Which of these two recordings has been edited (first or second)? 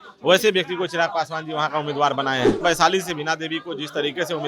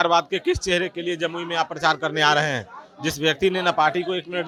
first